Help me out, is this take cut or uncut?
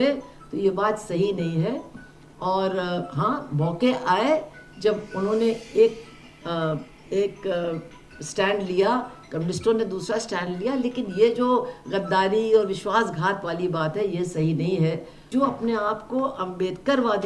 cut